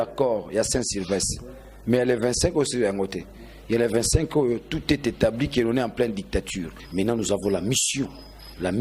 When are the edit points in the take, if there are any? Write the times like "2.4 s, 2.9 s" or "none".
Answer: 6.8 s